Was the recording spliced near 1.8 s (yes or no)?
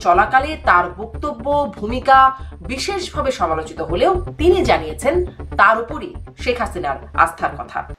no